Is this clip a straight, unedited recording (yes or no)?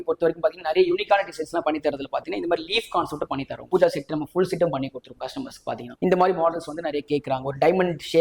no